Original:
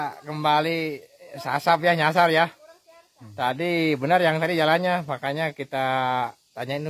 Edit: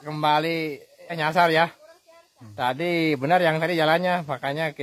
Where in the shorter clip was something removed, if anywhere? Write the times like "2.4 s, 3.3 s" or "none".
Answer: 1.2 s